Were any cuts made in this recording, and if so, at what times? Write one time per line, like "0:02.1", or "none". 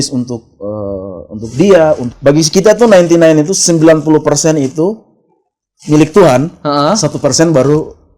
0:02.1